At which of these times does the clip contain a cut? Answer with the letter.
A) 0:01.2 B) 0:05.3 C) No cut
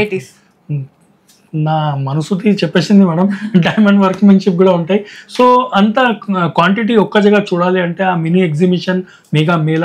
C